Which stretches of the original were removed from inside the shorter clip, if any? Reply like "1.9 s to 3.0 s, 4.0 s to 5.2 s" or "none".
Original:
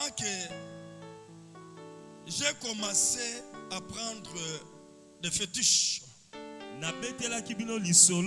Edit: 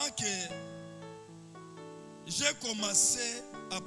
none